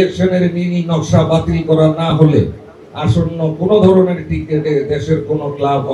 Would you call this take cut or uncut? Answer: uncut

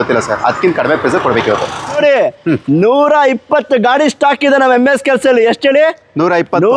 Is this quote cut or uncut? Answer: cut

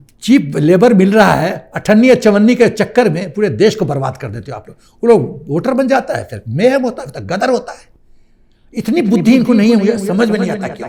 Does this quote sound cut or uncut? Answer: uncut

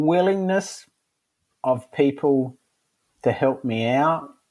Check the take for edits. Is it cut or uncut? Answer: uncut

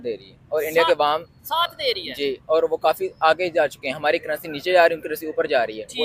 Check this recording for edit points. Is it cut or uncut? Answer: uncut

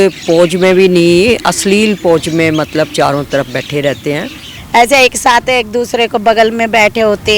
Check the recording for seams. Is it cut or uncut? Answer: cut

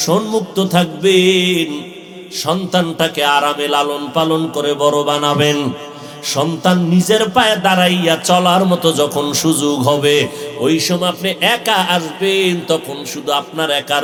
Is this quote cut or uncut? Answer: uncut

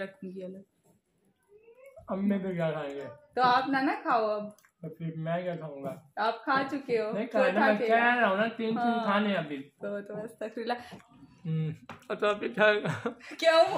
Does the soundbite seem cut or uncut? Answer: cut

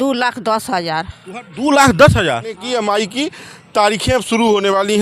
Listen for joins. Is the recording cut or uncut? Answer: cut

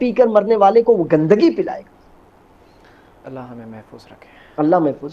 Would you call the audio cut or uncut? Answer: uncut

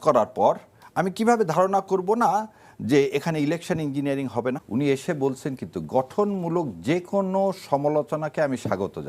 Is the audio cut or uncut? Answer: cut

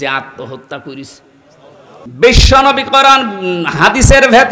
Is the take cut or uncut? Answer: cut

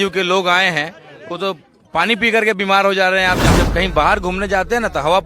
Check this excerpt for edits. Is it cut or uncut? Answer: cut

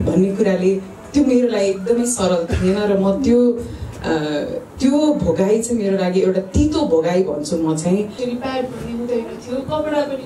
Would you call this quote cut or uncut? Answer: cut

